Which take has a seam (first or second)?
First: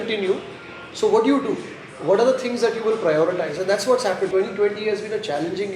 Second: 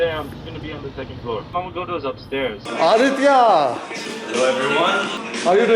second